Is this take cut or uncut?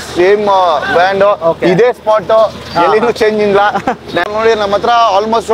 cut